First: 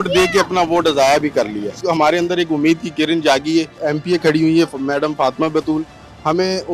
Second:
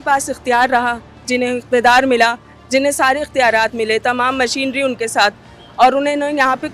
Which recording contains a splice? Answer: first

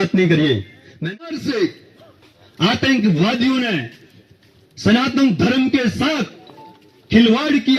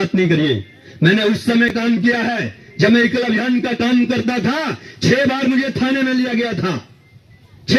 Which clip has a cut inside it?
first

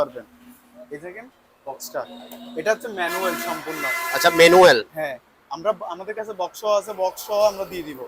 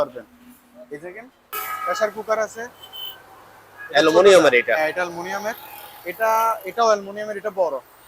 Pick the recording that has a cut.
second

